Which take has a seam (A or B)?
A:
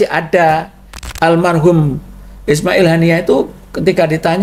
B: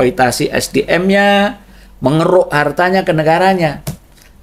A